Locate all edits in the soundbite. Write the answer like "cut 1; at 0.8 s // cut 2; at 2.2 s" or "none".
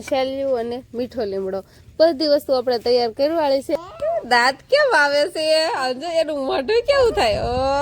cut 1; at 3.8 s